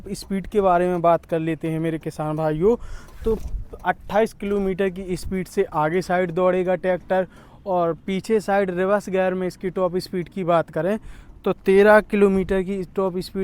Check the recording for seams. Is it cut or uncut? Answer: uncut